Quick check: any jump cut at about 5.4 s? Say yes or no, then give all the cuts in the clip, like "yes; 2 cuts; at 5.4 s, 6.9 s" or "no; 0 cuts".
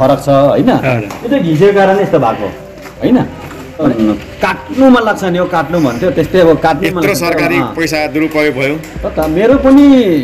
no; 1 cut; at 3.8 s